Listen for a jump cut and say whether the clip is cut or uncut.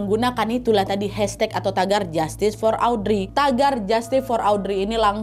cut